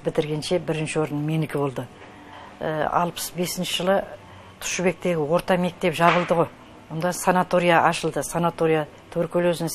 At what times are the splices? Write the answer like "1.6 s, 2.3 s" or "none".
none